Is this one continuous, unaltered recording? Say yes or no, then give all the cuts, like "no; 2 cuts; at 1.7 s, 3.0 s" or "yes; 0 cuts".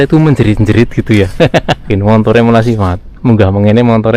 no; 1 cut; at 1.9 s